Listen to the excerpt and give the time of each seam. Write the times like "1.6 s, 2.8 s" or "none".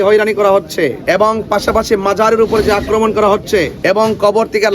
1.0 s, 3.7 s